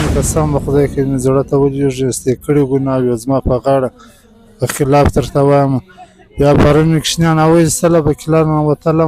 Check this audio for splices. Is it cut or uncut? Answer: uncut